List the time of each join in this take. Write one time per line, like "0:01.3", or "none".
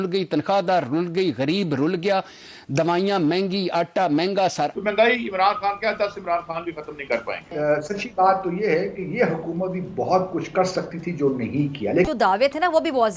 0:04.7
0:07.5
0:12.1